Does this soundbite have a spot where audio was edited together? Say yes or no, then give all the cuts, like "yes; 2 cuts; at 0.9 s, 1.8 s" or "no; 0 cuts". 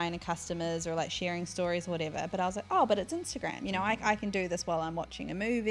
no; 0 cuts